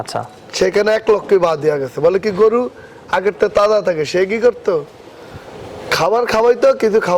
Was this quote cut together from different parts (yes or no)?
no